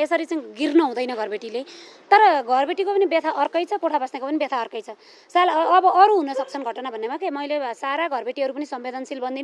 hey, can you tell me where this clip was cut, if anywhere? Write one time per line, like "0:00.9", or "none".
none